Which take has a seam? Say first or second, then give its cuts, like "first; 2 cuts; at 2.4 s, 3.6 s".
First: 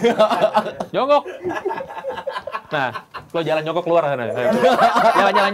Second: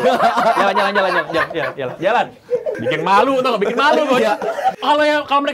second; 2 cuts; at 2.8 s, 4.8 s